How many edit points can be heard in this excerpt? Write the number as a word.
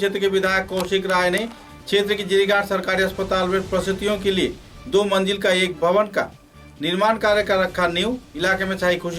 zero